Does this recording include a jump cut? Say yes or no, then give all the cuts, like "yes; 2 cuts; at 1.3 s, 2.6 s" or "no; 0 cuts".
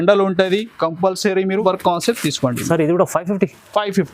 yes; 1 cut; at 1.6 s